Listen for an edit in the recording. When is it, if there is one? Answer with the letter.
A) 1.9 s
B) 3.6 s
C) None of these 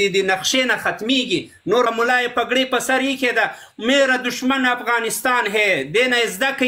A